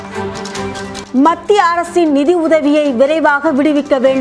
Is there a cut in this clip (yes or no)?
yes